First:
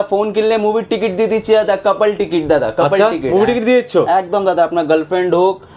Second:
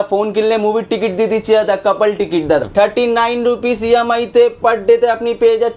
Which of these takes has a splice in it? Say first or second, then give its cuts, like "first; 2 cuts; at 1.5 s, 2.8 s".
second; 1 cut; at 2.7 s